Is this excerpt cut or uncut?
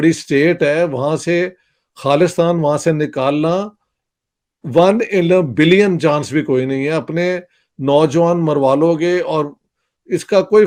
uncut